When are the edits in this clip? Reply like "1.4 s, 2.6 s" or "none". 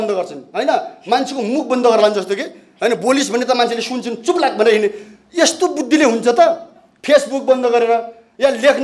none

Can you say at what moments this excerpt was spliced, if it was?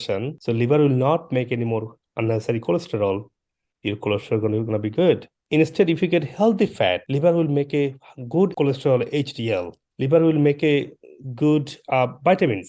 5.4 s, 7.1 s, 8.5 s, 9.8 s

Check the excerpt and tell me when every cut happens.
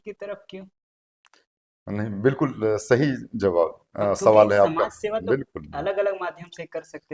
none

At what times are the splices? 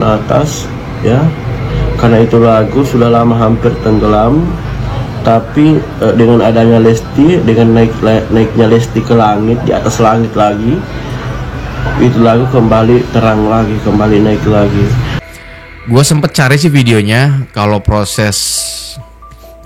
15.1 s

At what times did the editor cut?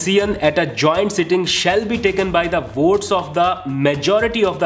none

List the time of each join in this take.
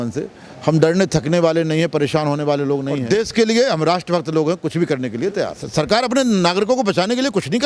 3.0 s, 5.6 s

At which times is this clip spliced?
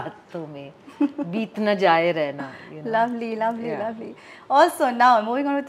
none

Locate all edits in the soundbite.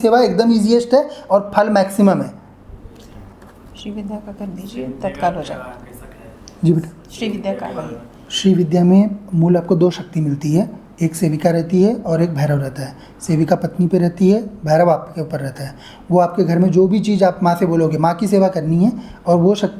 3.4 s

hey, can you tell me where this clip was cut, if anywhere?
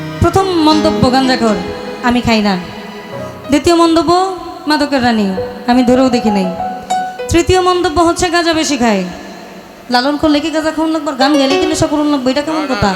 none

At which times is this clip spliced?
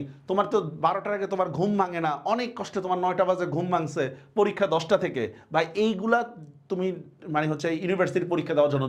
none

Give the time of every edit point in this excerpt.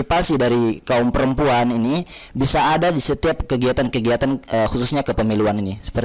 none

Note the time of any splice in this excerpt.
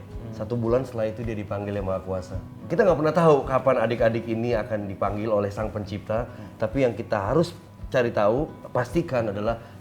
2.7 s

